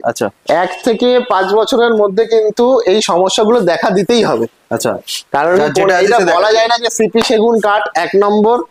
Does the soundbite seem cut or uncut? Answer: uncut